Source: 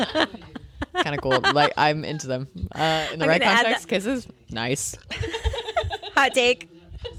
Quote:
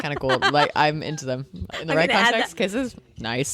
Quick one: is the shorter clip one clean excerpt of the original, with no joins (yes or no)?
no